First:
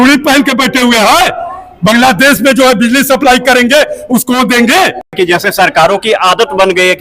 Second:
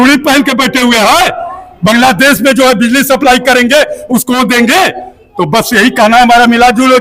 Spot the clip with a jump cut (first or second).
first